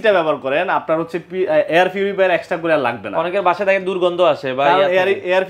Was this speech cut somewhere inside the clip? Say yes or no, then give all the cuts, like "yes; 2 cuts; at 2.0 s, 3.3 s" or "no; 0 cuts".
no; 0 cuts